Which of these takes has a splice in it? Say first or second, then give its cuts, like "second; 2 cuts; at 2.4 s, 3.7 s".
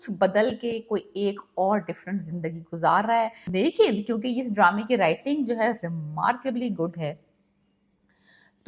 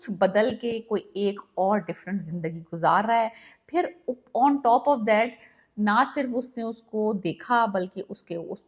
first; 1 cut; at 3.4 s